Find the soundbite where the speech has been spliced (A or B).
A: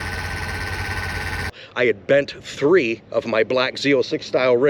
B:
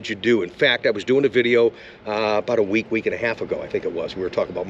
A